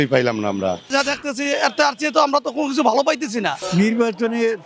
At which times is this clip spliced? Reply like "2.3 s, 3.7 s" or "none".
0.9 s, 3.6 s